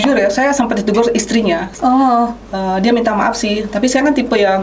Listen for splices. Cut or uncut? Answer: uncut